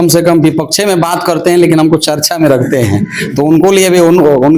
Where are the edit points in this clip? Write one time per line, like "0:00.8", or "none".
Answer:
none